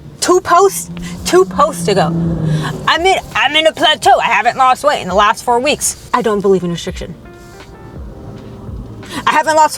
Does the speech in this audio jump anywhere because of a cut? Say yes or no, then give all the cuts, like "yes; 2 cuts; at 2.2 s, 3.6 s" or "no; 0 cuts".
no; 0 cuts